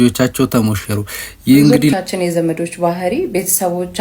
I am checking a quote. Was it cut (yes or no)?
yes